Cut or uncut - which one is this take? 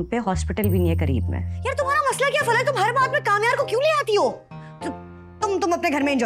cut